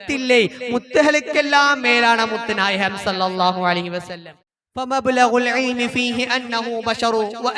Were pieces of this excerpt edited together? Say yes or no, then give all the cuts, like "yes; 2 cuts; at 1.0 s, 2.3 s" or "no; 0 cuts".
yes; 1 cut; at 4.1 s